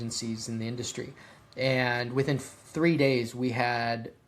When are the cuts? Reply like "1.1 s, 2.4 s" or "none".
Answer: none